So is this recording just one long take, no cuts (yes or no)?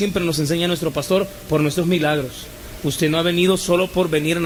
yes